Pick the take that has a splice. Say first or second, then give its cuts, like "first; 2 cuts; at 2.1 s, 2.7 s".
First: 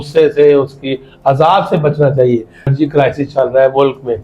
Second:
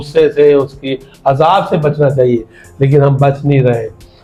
first; 1 cut; at 2.7 s